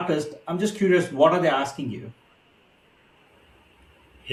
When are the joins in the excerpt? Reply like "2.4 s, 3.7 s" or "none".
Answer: none